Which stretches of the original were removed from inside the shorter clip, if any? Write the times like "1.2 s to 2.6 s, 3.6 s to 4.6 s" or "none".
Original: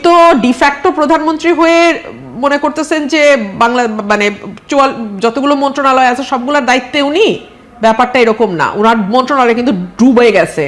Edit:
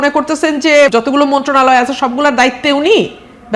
3.4 s to 5.2 s

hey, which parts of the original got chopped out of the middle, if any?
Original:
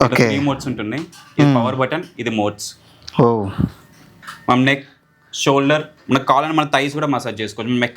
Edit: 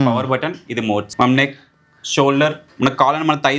2.6 s to 4.4 s

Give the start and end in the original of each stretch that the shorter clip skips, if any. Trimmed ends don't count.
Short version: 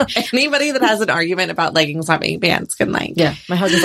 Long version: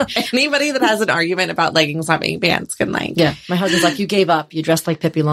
none

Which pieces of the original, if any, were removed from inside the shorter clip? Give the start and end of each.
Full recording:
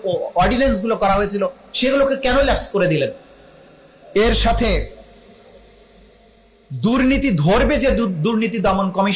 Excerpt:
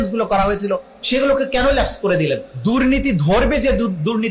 3.2 s to 6.7 s

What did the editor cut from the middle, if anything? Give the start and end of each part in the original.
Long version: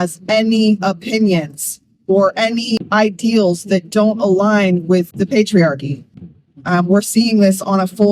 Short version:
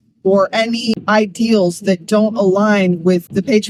none

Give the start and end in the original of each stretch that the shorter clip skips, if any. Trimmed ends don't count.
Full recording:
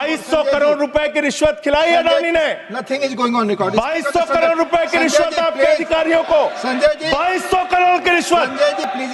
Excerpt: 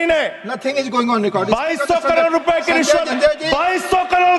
5.3 s to 6.7 s

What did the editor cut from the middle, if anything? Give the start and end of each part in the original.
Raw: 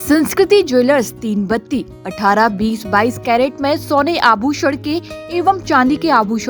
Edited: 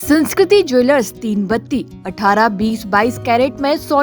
none

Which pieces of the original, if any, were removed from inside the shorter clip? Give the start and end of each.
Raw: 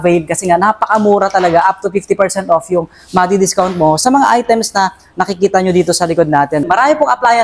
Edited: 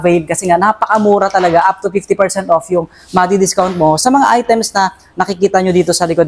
none

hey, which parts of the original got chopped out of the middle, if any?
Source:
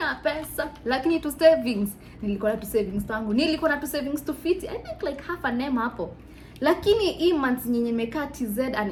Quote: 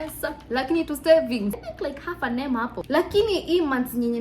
2.0 s to 4.9 s, 6.0 s to 6.5 s

